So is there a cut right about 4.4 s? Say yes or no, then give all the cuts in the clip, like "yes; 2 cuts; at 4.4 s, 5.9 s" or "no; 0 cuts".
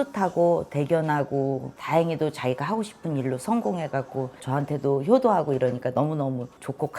no; 1 cut; at 1.7 s